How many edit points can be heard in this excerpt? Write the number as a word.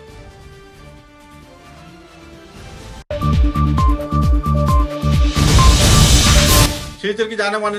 zero